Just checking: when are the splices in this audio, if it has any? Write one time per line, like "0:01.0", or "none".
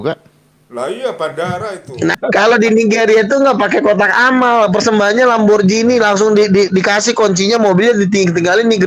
0:02.2